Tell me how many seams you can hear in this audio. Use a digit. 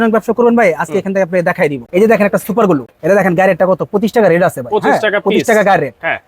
2